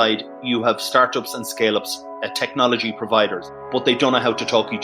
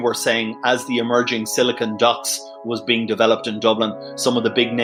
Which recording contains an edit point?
first; 1 cut; at 3.5 s

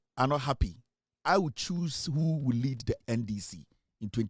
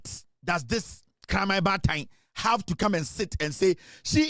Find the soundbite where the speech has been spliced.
first; 1 cut; at 3.0 s

